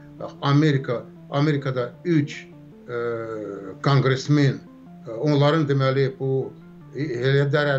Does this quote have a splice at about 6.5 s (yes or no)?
no